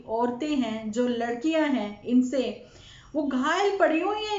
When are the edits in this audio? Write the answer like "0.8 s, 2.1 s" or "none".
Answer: none